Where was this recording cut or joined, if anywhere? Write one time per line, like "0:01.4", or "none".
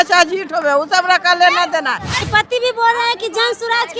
0:02.2